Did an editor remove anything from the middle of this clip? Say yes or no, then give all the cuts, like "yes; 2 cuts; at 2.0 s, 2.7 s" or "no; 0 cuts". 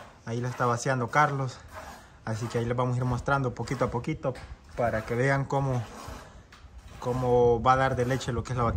no; 0 cuts